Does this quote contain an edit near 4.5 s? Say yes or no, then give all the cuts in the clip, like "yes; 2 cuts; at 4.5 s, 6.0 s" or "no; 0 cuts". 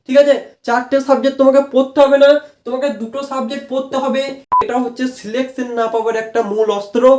yes; 1 cut; at 4.5 s